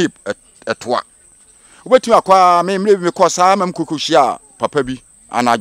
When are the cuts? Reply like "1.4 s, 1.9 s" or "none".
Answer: none